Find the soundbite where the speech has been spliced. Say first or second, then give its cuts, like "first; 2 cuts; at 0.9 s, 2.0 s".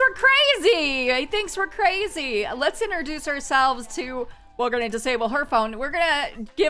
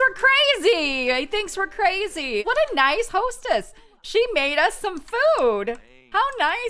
second; 1 cut; at 2.4 s